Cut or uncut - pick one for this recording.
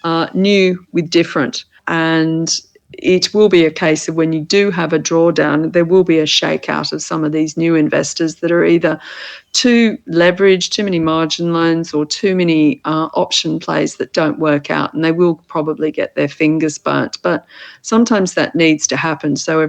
cut